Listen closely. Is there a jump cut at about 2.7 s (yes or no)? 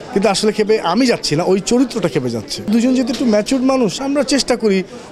yes